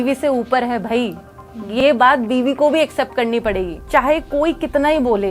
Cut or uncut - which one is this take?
cut